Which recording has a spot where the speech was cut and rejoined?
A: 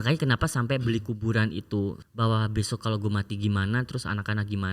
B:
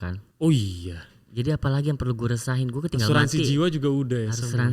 A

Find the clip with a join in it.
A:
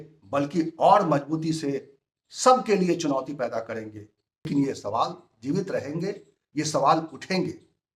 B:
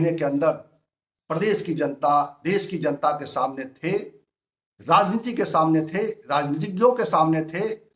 A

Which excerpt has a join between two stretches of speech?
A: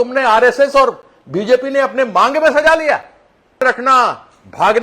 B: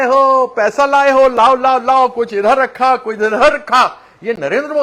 A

